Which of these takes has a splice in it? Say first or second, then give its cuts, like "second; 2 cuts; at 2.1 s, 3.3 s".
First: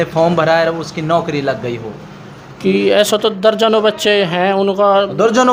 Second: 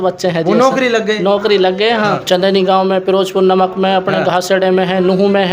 second; 1 cut; at 2.2 s